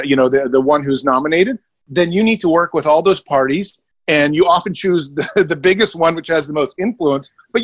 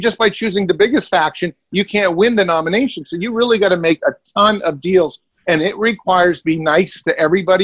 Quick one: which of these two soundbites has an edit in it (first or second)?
first